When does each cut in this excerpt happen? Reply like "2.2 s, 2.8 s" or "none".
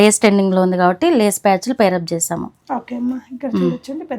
none